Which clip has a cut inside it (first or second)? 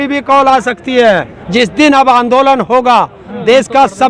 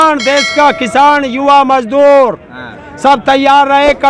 first